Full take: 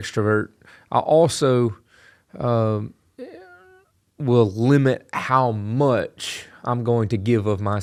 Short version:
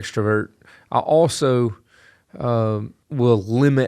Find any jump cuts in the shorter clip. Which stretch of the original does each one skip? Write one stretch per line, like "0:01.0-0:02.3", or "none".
0:03.0-0:04.1